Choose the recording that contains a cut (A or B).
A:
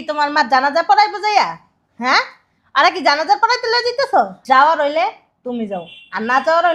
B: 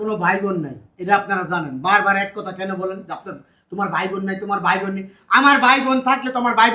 A